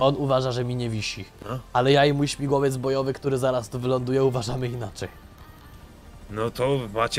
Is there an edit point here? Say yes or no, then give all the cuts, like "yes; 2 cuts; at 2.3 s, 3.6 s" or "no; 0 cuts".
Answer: yes; 1 cut; at 6.1 s